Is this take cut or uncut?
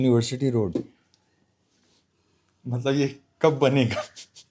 uncut